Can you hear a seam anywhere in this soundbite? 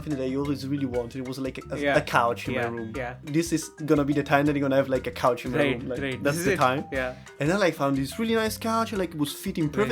yes; 2 cuts; at 3.2 s, 7.3 s

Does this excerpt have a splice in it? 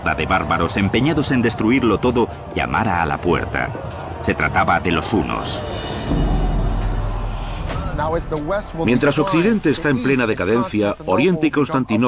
no; 0 cuts

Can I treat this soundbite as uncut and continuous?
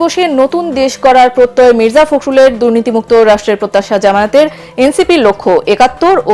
yes; 0 cuts

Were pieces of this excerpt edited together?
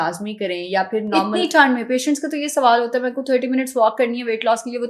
no; 0 cuts

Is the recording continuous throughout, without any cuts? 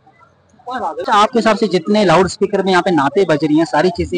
no; 1 cut; at 1.0 s

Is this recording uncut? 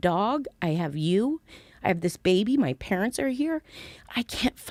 yes; 0 cuts

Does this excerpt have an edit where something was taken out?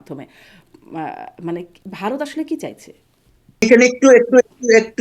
yes; 1 cut; at 3.6 s

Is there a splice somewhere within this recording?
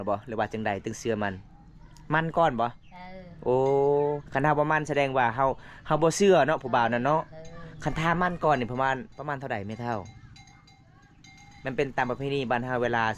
no; 0 cuts

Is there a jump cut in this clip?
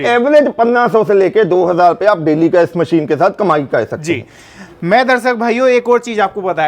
no; 0 cuts

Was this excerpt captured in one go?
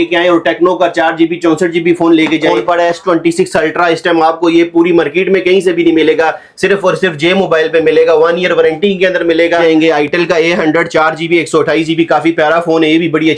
no; 2 cuts; at 2.5 s, 9.6 s

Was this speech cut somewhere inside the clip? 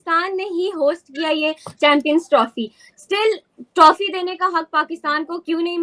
no; 0 cuts

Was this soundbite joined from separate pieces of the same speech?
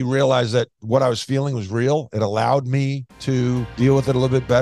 yes; 1 cut; at 3.7 s

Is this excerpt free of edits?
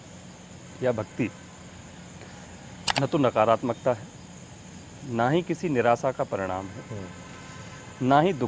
yes; 0 cuts

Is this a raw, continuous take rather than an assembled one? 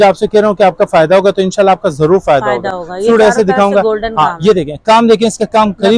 yes; 0 cuts

